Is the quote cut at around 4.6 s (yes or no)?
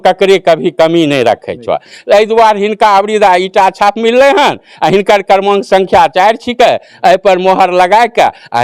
no